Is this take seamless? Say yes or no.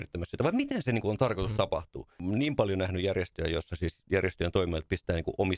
no